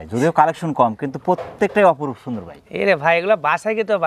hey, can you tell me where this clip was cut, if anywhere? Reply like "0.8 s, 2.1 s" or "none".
none

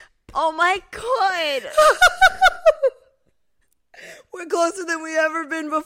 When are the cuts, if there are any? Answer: none

